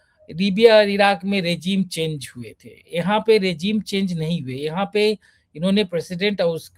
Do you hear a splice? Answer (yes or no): no